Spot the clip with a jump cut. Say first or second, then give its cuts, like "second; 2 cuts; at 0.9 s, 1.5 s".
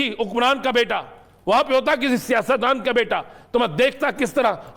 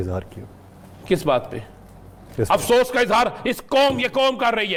first; 1 cut; at 3.4 s